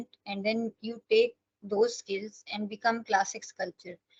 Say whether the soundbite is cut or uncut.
uncut